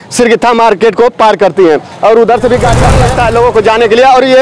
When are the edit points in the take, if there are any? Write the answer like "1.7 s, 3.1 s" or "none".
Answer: 2.9 s

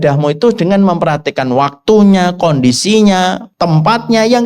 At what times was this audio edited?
3.5 s

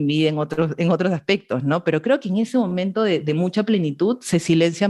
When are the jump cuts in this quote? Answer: none

